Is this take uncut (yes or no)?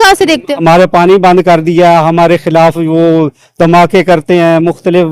yes